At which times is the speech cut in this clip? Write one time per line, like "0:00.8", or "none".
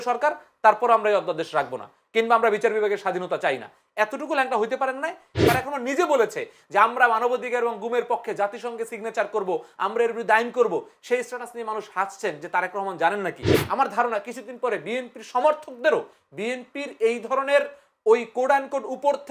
0:05.4
0:13.5